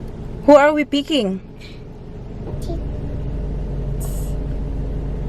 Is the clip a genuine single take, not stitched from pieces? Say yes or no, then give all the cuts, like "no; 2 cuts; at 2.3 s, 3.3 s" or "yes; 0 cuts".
yes; 0 cuts